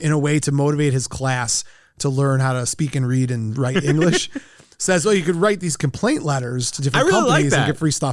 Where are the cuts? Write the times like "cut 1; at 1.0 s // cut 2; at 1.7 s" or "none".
none

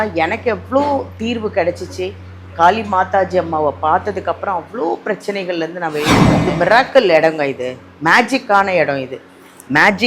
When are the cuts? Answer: cut 1; at 6.3 s

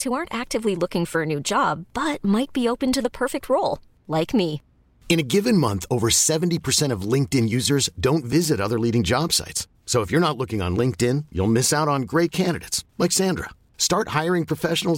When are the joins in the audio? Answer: none

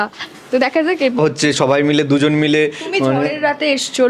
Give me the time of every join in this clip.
cut 1; at 1.2 s

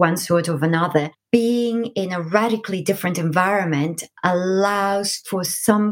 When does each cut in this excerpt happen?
cut 1; at 1.2 s

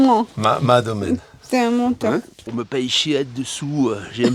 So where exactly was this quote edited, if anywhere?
cut 1; at 2.5 s

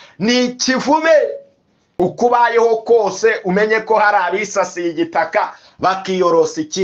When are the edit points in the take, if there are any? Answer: cut 1; at 1.9 s

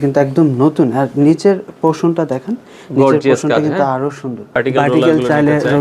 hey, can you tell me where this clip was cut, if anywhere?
cut 1; at 4.5 s

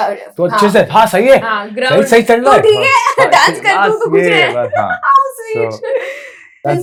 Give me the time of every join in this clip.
none

